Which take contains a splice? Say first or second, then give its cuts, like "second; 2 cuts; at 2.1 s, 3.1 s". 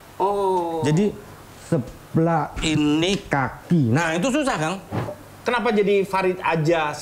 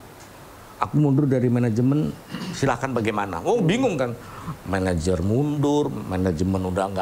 first; 1 cut; at 5.2 s